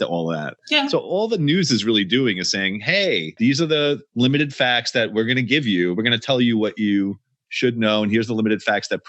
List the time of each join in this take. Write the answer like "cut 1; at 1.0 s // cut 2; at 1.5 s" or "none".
cut 1; at 3.3 s